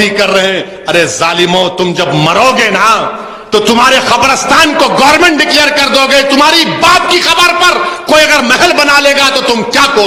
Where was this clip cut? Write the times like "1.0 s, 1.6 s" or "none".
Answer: none

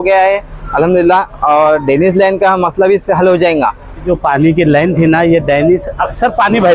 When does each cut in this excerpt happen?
4.0 s

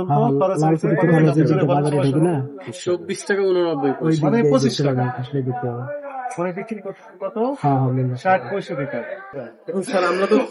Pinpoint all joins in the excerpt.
none

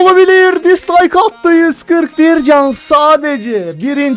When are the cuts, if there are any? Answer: none

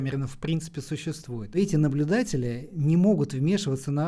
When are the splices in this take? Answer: 1.6 s, 2.7 s

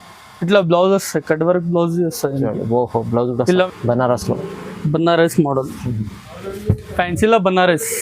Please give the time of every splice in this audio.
3.7 s

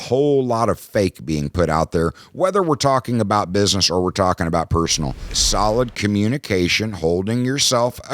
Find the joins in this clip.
5.4 s

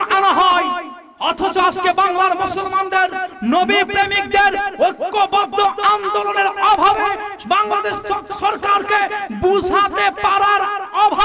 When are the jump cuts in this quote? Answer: none

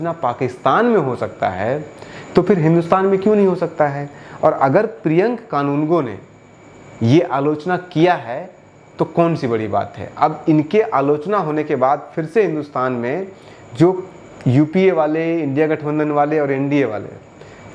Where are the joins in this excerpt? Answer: none

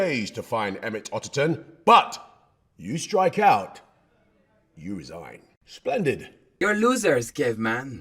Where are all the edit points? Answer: 6.4 s

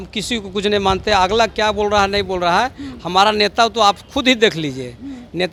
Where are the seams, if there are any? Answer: none

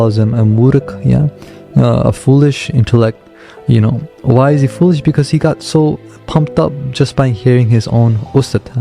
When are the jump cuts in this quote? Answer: none

